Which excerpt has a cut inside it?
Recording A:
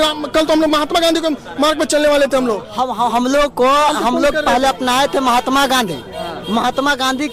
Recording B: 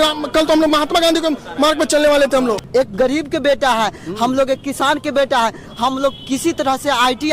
B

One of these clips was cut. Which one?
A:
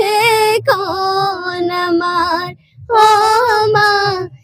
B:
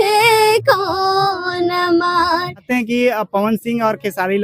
B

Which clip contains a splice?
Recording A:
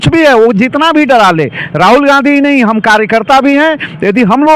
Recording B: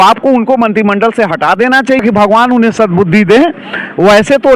B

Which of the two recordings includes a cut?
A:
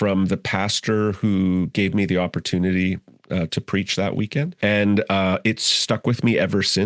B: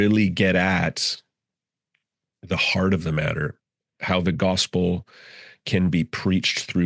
A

